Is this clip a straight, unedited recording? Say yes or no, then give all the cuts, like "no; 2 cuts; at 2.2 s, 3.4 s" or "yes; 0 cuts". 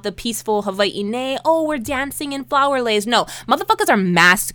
yes; 0 cuts